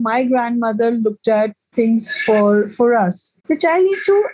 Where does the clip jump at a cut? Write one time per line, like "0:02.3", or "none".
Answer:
0:03.3

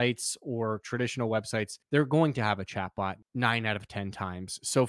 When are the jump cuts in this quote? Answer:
0:01.8
0:03.2

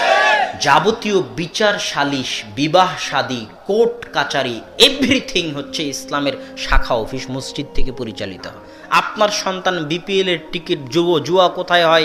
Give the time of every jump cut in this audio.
0:08.8

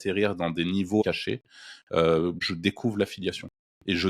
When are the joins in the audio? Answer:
0:01.0
0:02.4

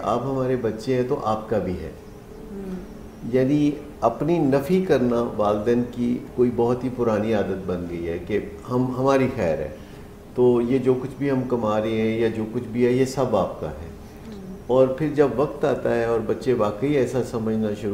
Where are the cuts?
none

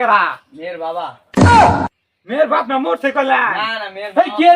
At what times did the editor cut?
0:01.2
0:02.0

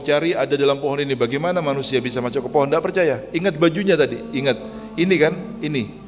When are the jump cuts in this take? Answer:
none

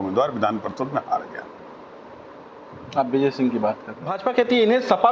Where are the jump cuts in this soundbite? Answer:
0:04.1

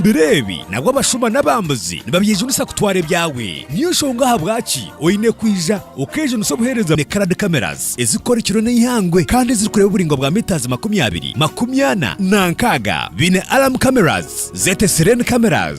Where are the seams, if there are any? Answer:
0:07.0

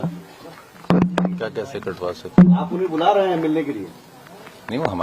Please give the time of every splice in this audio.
none

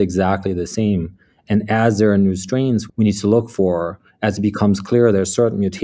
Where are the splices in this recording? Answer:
0:02.9

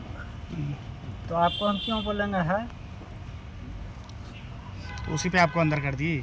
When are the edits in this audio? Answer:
none

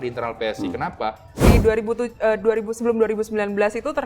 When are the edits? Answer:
0:01.3

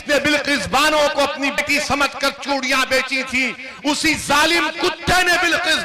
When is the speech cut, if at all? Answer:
0:01.6

